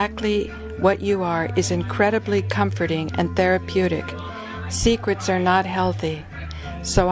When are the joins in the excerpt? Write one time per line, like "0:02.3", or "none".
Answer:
none